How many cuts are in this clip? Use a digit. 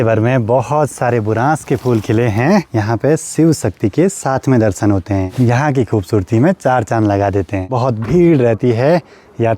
3